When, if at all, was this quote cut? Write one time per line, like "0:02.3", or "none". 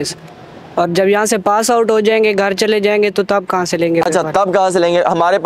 none